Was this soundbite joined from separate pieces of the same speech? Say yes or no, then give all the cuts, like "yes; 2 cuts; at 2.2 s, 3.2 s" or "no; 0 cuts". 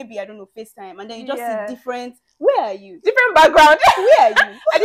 yes; 1 cut; at 2.9 s